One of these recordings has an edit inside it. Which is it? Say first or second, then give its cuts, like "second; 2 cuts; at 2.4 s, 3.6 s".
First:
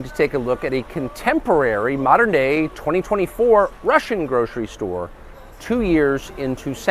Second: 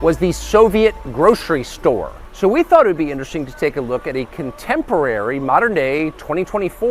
second; 1 cut; at 2.2 s